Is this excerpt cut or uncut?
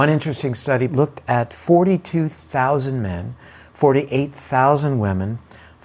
cut